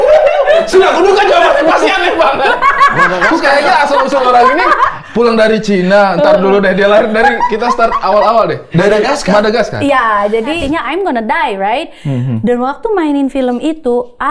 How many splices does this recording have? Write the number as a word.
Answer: one